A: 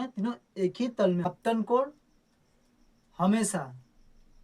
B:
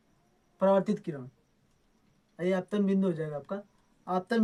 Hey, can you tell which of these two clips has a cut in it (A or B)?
A